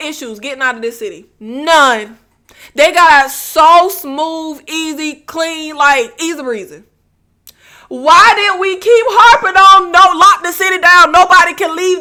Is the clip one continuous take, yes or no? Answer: yes